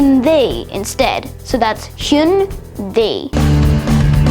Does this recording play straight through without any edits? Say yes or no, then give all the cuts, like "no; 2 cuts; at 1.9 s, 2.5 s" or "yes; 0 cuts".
no; 1 cut; at 3.2 s